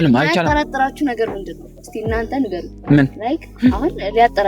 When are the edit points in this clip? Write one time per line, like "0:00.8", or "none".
0:02.7